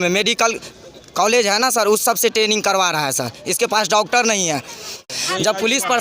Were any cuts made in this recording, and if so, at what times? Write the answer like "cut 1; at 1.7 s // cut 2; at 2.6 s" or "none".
cut 1; at 4.9 s